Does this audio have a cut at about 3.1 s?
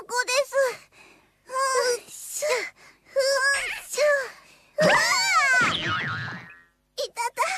no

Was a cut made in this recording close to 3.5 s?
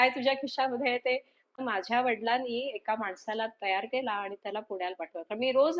no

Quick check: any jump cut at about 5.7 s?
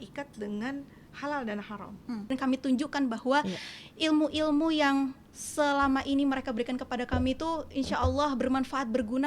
no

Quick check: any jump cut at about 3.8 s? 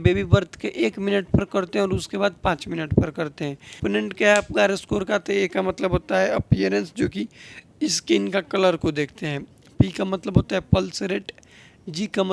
yes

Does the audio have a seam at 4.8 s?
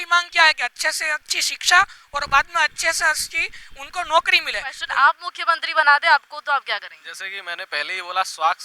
yes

